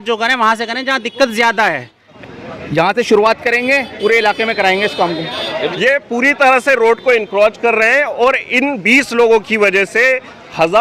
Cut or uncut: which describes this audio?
cut